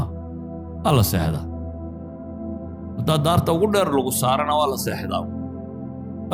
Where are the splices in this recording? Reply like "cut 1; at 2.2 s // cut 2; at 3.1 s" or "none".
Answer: cut 1; at 1.4 s // cut 2; at 3.0 s